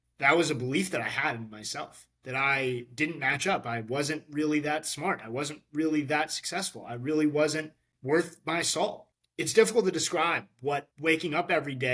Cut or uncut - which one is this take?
cut